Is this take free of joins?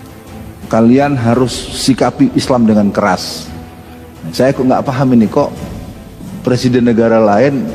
yes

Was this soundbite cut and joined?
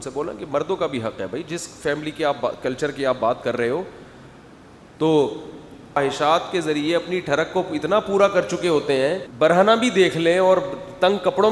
yes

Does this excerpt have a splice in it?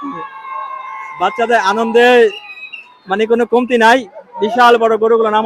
no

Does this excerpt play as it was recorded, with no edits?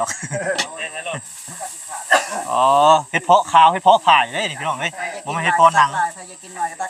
yes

